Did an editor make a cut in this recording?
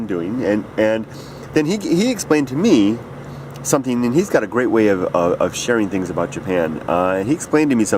yes; 1 cut; at 2.9 s

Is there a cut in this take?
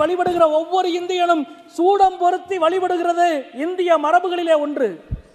no; 0 cuts

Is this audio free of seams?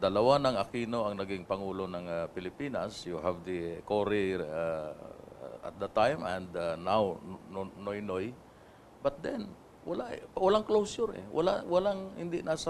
yes; 0 cuts

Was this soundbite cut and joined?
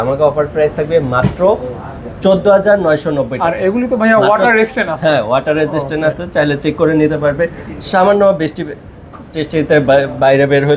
no; 0 cuts

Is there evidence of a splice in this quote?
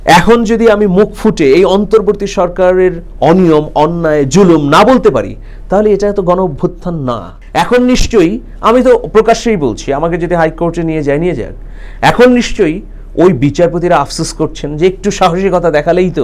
yes; 1 cut; at 7.3 s

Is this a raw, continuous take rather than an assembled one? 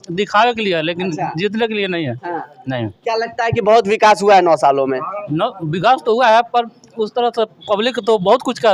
yes; 0 cuts

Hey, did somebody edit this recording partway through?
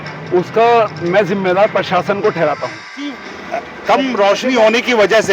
yes; 1 cut; at 3.3 s

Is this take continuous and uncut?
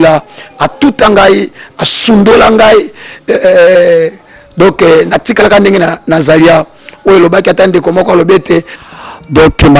no; 1 cut; at 8.8 s

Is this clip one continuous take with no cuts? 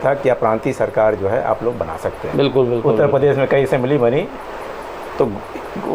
yes; 0 cuts

